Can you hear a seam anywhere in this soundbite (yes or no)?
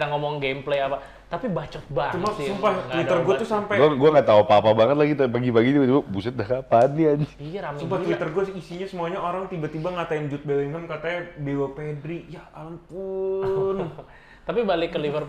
no